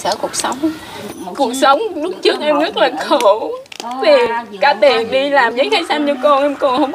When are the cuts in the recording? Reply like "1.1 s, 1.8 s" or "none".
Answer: 1.2 s